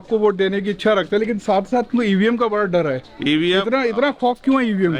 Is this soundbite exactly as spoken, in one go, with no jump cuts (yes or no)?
yes